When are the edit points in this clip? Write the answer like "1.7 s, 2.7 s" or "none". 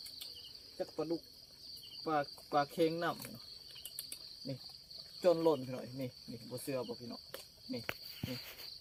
none